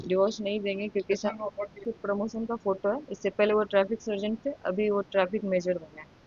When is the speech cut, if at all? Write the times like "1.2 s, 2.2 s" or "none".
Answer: 1.8 s